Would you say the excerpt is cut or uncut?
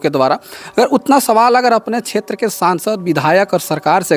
uncut